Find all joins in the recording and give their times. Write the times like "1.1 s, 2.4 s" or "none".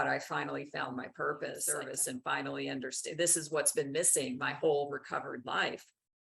1.7 s